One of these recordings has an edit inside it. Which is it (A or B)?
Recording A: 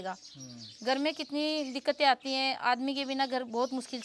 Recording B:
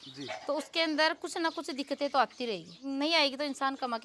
B